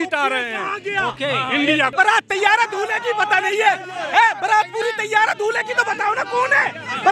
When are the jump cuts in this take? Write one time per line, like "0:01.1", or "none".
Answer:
0:01.9